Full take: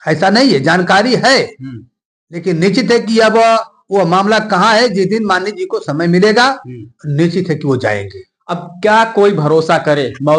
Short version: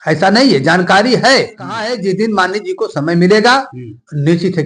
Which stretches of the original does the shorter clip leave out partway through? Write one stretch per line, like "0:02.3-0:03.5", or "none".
0:01.9-0:04.8

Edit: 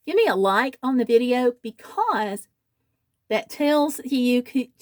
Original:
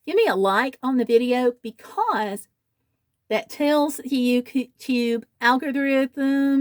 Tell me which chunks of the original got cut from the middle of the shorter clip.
none

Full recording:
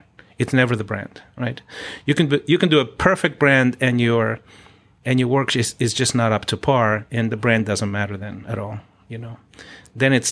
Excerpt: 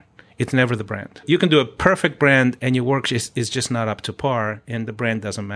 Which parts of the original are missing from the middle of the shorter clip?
0:01.2-0:02.4
0:03.8-0:05.0

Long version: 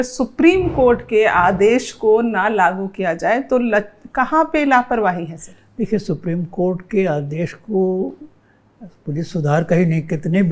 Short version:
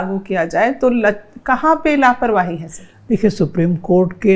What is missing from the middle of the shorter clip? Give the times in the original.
none

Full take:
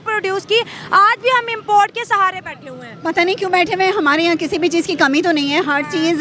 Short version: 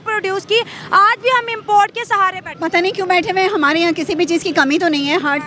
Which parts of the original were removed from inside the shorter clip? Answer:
0:02.5-0:02.9

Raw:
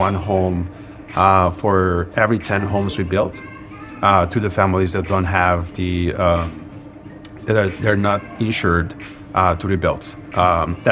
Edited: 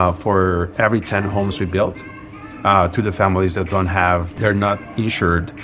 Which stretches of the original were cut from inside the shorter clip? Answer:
0:05.7-0:07.8

